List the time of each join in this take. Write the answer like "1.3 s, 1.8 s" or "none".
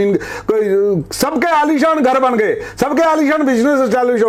none